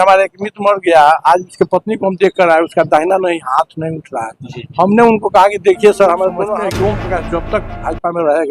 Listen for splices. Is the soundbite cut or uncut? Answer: cut